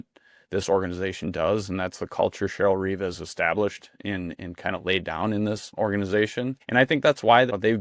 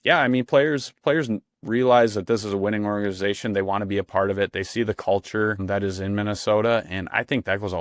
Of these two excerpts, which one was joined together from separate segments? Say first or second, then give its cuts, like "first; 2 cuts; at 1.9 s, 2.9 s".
first; 1 cut; at 6.6 s